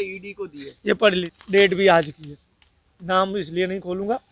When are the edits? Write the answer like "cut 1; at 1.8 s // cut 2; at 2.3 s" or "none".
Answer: cut 1; at 1.3 s

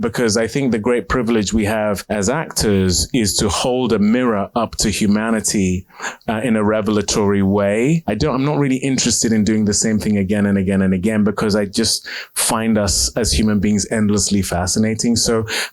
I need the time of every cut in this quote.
cut 1; at 2.0 s // cut 2; at 8.0 s

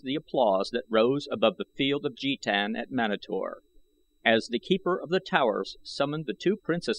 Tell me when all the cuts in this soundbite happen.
none

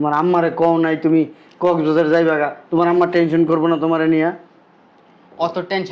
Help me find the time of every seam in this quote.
none

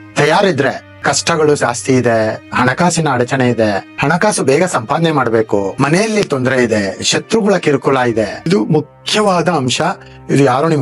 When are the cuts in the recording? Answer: cut 1; at 0.9 s // cut 2; at 3.9 s // cut 3; at 5.7 s // cut 4; at 8.5 s

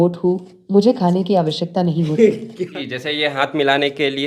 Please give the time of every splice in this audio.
cut 1; at 2.8 s

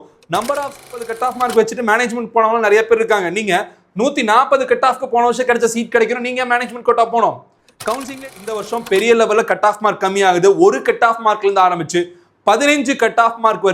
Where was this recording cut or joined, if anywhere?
cut 1; at 1.0 s // cut 2; at 8.2 s

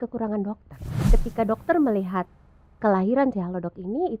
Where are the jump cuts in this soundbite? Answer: cut 1; at 0.9 s

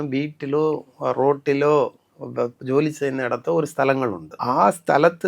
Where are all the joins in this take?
cut 1; at 4.3 s

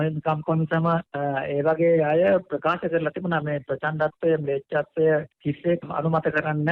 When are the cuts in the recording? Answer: cut 1; at 1.1 s // cut 2; at 5.8 s

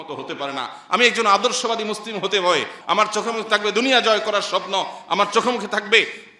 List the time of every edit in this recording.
cut 1; at 2.7 s

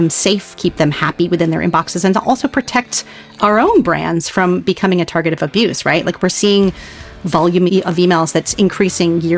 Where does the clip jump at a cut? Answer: cut 1; at 7.7 s

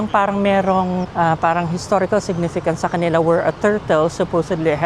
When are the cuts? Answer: cut 1; at 1.1 s

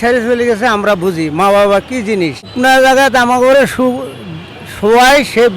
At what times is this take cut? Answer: cut 1; at 2.5 s

